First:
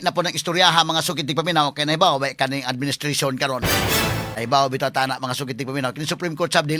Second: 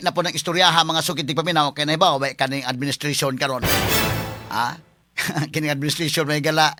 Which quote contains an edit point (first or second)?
first